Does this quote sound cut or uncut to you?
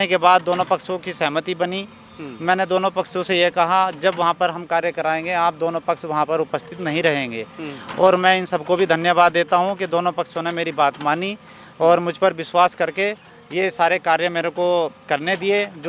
uncut